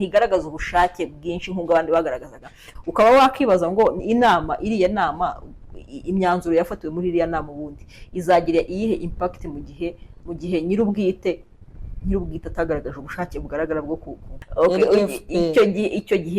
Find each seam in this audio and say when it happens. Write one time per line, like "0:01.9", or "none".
0:02.7
0:14.4

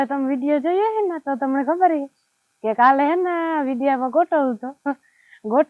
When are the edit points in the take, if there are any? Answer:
none

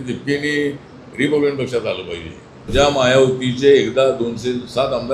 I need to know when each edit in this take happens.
0:02.6

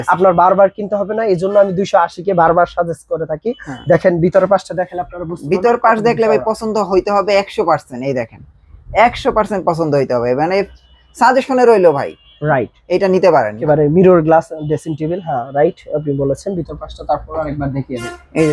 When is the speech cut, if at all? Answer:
0:13.6

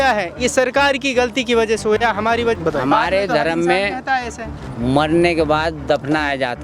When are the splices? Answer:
0:02.6

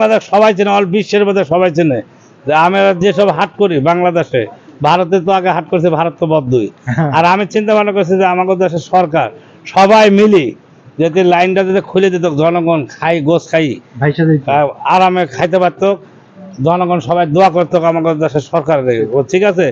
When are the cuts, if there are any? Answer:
none

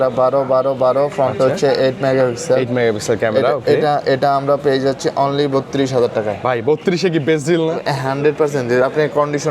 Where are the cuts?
none

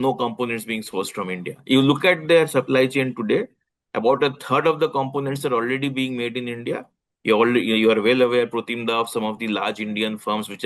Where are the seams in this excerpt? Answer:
none

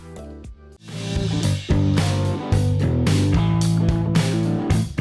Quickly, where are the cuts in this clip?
0:01.0

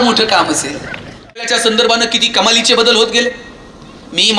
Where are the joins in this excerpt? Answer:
0:01.5

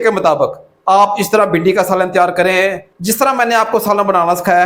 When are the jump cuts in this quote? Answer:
0:03.0

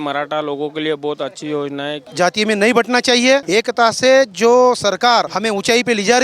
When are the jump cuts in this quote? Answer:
0:02.0
0:03.5
0:05.3

